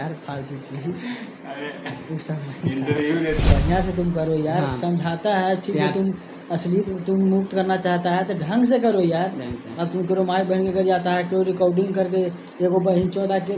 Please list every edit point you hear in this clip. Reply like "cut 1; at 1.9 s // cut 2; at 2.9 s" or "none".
cut 1; at 3.4 s